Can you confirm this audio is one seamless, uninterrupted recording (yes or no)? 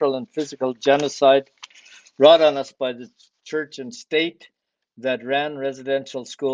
yes